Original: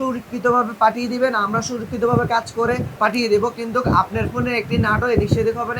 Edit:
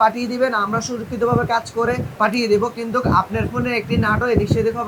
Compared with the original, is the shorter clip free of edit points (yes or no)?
yes